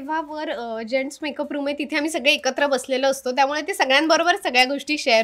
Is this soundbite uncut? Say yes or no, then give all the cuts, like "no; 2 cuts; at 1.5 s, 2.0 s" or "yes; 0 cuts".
yes; 0 cuts